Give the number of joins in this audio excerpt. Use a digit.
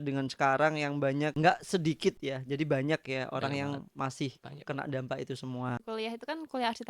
2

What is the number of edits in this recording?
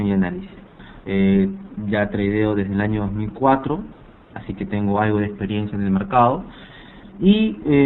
1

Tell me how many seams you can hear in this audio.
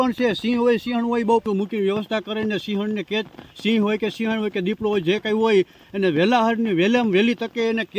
1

